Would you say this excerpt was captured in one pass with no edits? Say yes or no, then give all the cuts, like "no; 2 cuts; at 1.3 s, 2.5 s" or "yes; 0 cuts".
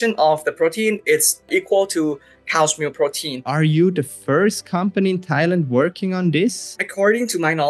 no; 3 cuts; at 1.5 s, 3.5 s, 6.8 s